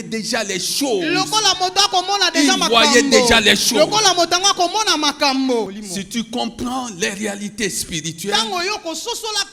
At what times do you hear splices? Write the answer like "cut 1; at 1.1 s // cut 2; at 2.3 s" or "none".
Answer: cut 1; at 5.7 s